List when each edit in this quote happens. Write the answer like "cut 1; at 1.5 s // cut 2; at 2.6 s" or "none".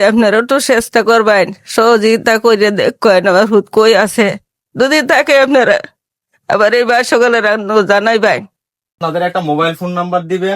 cut 1; at 8.6 s